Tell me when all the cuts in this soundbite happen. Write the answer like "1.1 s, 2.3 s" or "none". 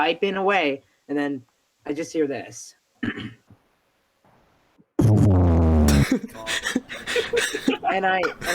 none